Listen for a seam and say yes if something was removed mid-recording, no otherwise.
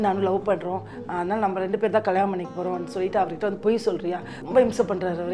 yes